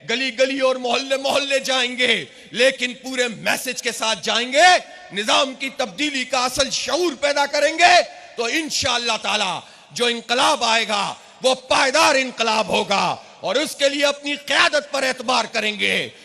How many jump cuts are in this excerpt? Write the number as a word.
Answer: zero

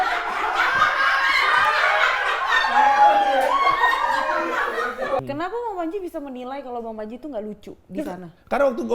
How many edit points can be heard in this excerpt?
one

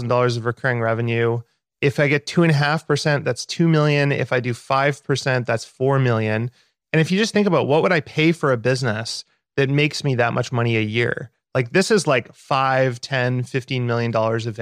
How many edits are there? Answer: zero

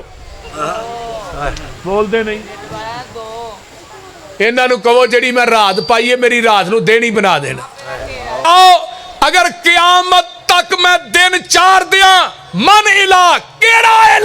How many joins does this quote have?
one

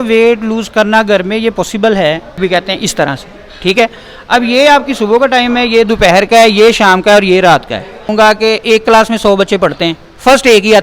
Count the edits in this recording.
two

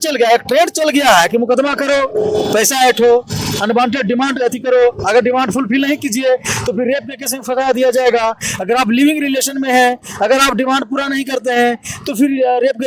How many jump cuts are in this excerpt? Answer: zero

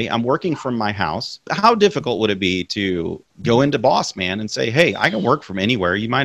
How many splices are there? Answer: two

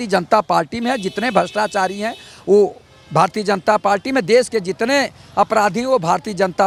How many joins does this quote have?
zero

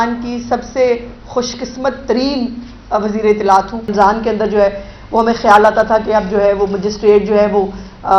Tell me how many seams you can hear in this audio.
one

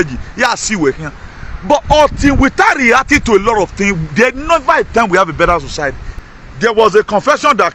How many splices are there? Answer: one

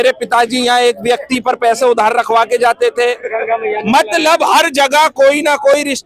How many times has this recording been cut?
zero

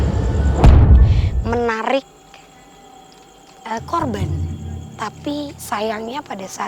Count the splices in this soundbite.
one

